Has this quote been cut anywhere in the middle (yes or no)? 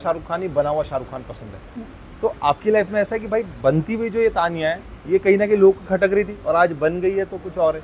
no